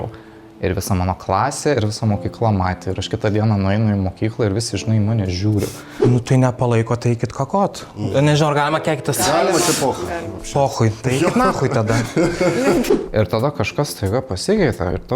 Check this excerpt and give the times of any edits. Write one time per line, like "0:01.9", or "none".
0:05.9
0:12.9